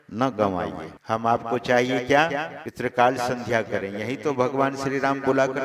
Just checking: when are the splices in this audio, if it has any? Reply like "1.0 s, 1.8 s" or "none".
0.9 s, 2.6 s